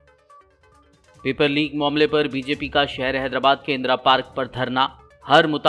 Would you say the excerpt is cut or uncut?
cut